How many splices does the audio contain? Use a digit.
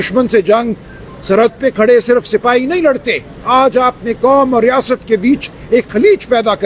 1